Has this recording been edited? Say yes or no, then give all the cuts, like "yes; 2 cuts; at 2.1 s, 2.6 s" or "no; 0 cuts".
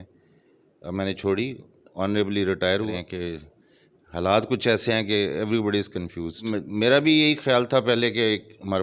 yes; 2 cuts; at 2.9 s, 6.5 s